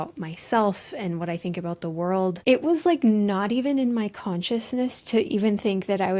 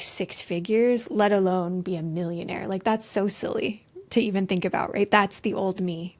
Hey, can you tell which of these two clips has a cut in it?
first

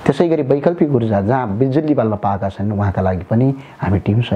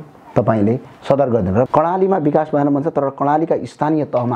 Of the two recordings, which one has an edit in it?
second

